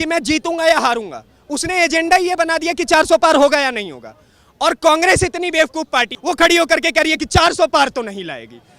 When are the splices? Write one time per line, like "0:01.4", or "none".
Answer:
0:06.1

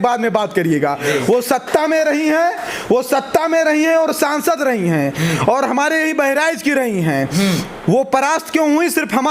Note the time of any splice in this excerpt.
none

